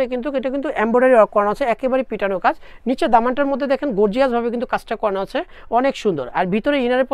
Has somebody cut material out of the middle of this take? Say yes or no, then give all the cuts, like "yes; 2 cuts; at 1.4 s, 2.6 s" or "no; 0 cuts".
no; 0 cuts